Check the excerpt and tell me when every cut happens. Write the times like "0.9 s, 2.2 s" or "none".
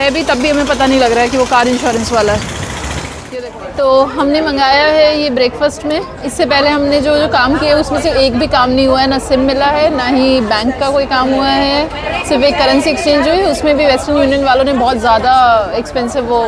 3.3 s